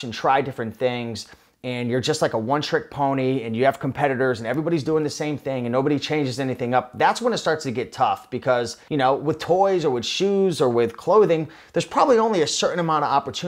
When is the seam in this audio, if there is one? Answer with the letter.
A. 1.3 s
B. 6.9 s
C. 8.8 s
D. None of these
C